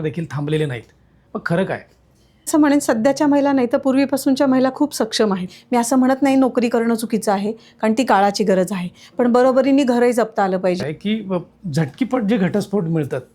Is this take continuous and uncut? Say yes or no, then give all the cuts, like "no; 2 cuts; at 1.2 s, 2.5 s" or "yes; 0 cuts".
no; 3 cuts; at 2.5 s, 5.6 s, 10.9 s